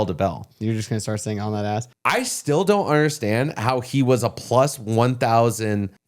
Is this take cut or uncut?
cut